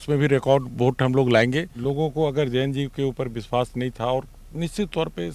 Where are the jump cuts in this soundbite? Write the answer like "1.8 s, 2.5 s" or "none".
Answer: 1.7 s